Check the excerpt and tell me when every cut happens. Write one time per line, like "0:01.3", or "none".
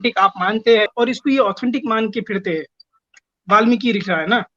0:00.9
0:03.0